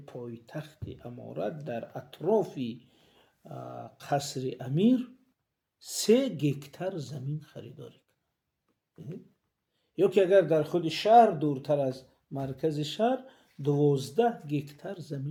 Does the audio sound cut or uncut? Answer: uncut